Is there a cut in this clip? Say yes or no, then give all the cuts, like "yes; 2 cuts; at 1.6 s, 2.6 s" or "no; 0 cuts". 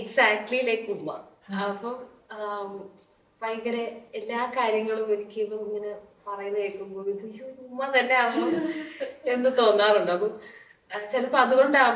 no; 0 cuts